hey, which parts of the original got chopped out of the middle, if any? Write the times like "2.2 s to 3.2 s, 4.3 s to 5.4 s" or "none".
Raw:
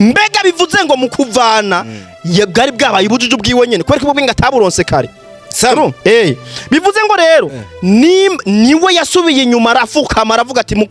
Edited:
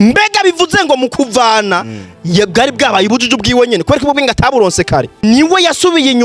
5.2 s to 8.5 s